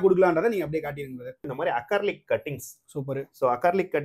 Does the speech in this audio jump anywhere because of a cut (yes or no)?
yes